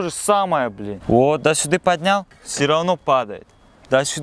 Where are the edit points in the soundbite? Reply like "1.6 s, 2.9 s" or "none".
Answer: 0.9 s